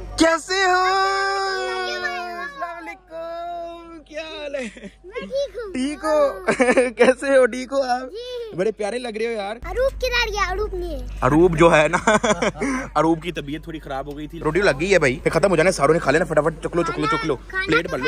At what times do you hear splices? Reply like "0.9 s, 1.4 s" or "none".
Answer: 9.6 s, 14.3 s